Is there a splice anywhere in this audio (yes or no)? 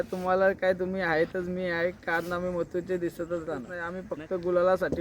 yes